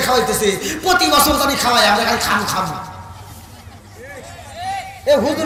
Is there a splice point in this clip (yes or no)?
no